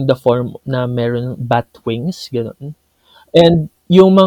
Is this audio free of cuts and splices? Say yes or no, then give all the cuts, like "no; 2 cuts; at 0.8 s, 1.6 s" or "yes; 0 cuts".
yes; 0 cuts